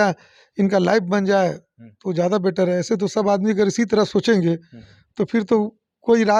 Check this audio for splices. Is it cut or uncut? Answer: uncut